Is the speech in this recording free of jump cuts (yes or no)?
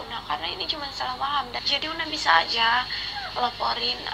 no